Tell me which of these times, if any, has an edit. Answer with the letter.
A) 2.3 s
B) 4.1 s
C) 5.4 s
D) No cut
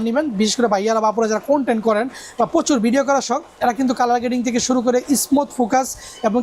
D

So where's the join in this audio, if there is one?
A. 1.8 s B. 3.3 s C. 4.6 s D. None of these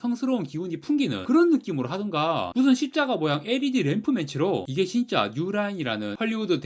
C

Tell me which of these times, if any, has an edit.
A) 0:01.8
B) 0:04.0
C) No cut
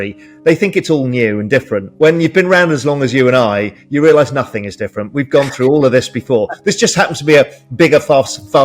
A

